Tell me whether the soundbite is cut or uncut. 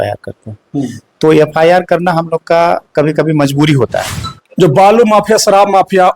cut